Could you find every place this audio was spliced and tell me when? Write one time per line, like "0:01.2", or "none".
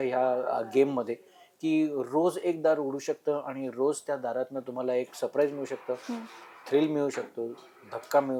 none